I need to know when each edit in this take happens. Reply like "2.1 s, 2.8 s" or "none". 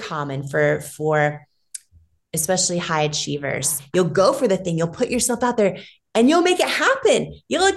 3.8 s